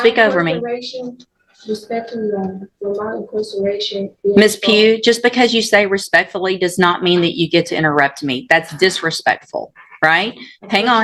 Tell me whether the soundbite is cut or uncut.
uncut